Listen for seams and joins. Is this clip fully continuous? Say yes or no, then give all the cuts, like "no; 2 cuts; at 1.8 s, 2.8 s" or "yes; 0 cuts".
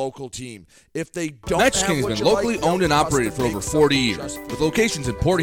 no; 1 cut; at 1.6 s